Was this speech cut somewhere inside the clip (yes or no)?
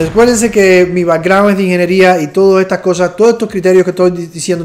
no